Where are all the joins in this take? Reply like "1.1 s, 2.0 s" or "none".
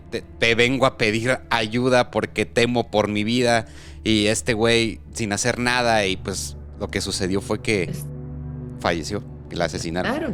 none